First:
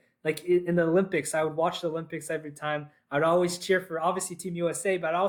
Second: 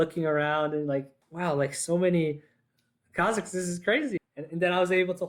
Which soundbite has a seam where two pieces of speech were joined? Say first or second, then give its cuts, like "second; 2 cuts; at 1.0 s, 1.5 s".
second; 2 cuts; at 1.2 s, 4.2 s